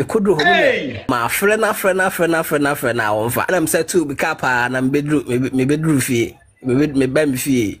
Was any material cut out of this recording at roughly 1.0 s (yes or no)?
yes